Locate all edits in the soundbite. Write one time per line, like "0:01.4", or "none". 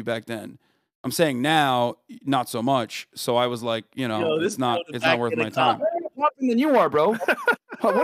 none